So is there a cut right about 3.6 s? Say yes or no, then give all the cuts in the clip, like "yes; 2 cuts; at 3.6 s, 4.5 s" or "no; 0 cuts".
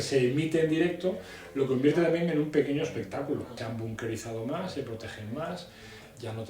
yes; 1 cut; at 3.6 s